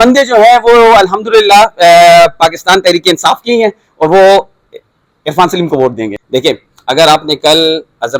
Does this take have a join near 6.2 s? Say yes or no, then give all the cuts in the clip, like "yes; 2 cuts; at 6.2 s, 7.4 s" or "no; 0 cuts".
no; 0 cuts